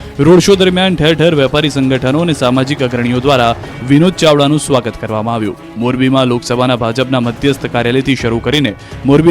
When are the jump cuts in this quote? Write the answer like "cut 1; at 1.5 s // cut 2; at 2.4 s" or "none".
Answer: cut 1; at 6.2 s